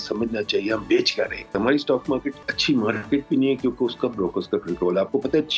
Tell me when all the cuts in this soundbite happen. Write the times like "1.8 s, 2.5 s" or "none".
1.5 s, 2.5 s